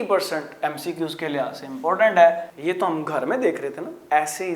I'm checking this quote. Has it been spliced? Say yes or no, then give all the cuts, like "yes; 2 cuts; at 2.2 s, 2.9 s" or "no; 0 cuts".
yes; 1 cut; at 2.5 s